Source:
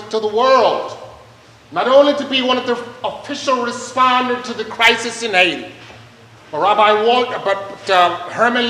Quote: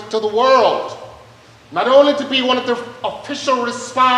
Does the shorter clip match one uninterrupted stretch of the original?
yes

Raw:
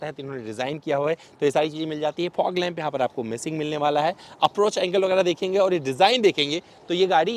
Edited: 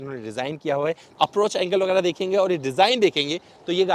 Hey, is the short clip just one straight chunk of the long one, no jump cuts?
no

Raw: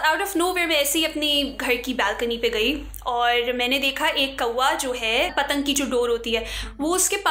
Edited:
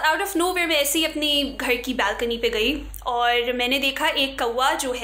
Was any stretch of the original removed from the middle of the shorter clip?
no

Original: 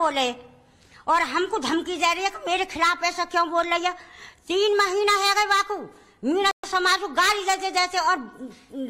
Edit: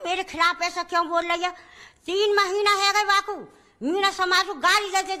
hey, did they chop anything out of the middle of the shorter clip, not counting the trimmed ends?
yes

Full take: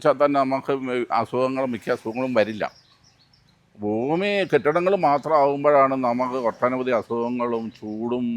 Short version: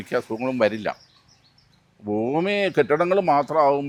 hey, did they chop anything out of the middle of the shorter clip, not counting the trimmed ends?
no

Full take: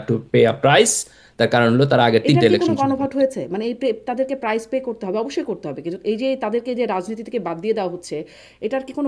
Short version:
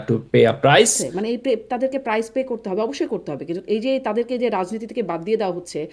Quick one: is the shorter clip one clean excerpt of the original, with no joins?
no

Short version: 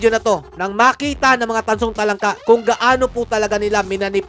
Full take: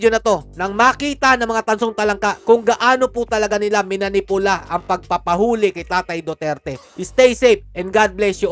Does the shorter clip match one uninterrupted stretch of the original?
yes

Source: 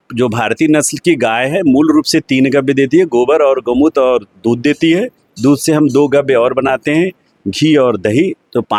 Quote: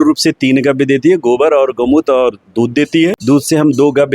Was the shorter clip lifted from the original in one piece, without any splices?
no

